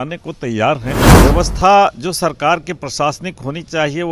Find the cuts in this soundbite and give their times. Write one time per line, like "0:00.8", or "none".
0:01.1